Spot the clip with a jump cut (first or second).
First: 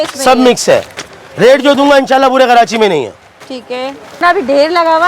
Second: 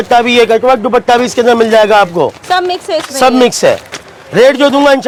first